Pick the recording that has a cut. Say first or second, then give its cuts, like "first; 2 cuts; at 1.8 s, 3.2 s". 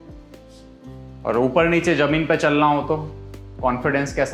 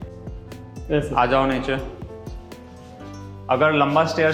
first; 1 cut; at 1.2 s